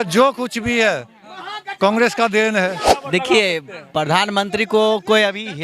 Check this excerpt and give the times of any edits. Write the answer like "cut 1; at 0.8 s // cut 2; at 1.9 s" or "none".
cut 1; at 3.0 s